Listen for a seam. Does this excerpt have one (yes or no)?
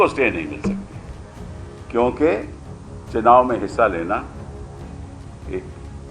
no